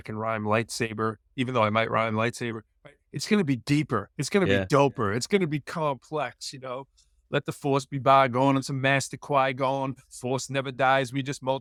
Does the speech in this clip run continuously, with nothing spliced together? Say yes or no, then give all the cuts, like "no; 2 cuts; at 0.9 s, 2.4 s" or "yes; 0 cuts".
yes; 0 cuts